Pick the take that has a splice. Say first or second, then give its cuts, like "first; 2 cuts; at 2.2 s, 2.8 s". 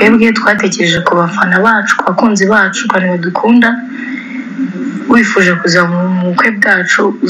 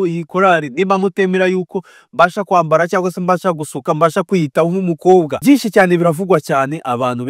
second; 1 cut; at 5.3 s